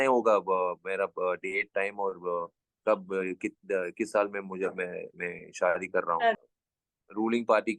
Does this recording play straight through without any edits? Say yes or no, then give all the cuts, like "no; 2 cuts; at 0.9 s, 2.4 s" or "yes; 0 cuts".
no; 1 cut; at 6.4 s